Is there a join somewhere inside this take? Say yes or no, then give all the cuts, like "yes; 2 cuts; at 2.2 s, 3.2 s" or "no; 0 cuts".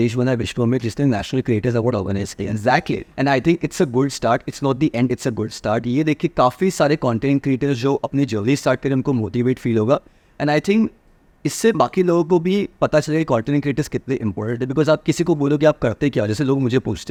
no; 0 cuts